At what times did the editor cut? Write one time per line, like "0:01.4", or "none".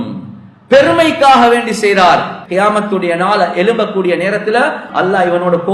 0:02.4
0:04.9